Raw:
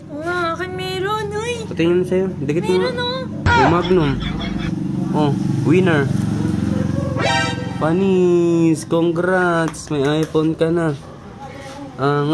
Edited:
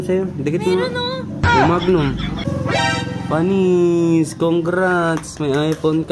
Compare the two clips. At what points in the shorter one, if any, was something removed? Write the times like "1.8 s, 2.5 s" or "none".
2.4 s